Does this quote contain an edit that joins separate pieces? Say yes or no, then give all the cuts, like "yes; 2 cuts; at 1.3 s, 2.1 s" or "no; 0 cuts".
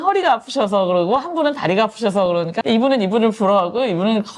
yes; 1 cut; at 2.6 s